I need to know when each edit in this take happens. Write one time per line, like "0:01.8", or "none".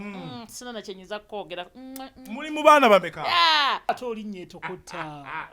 0:03.9